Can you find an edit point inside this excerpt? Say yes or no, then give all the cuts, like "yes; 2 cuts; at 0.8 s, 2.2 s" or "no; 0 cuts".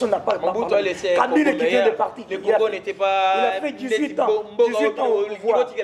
no; 0 cuts